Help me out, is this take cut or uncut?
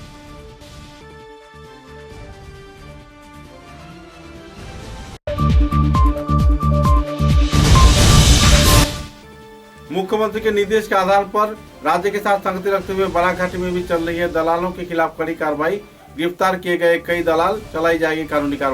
cut